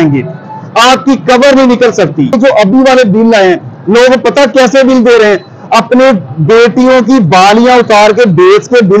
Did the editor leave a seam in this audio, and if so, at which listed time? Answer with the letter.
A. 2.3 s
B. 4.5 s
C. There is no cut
A